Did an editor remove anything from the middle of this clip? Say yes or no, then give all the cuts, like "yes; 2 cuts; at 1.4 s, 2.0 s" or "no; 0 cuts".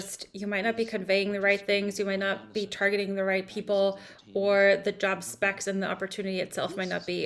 no; 0 cuts